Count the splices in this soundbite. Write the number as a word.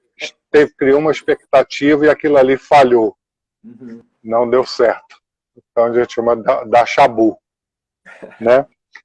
zero